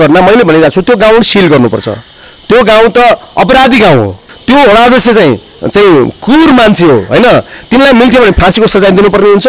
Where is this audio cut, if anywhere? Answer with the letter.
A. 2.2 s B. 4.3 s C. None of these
B